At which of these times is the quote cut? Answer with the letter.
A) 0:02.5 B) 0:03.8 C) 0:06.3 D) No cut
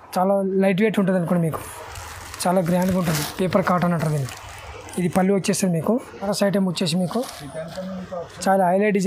C